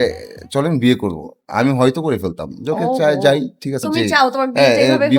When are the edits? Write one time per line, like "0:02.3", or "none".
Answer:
0:03.9